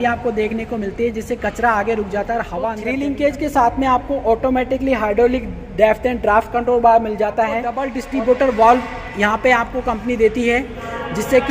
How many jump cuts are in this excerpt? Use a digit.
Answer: 2